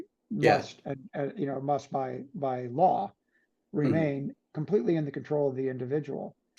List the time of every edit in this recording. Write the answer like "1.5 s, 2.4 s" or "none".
none